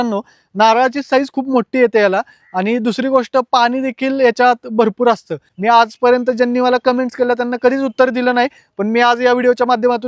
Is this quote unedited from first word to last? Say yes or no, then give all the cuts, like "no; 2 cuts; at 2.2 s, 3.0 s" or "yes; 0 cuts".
no; 1 cut; at 5.4 s